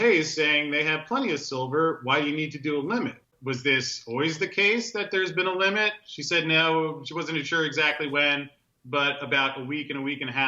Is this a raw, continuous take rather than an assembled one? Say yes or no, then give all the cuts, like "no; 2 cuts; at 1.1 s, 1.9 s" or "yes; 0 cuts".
no; 1 cut; at 3.3 s